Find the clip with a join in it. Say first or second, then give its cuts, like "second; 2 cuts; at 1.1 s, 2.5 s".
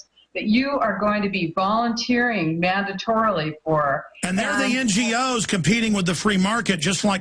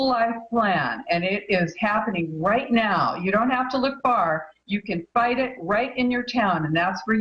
second; 1 cut; at 1.6 s